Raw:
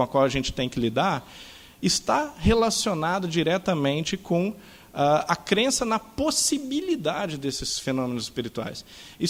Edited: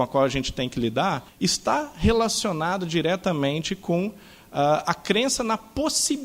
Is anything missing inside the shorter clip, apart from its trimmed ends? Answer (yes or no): yes